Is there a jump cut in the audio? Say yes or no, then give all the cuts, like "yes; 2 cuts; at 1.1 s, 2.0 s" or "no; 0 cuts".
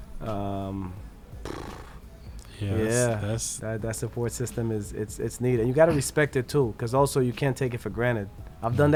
no; 0 cuts